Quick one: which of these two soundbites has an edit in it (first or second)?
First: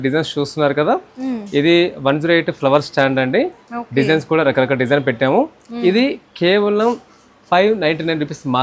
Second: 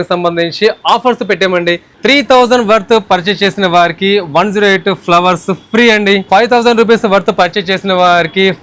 second